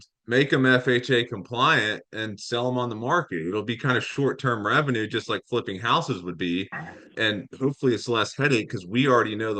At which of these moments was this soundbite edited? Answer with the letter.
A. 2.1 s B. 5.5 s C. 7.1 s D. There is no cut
C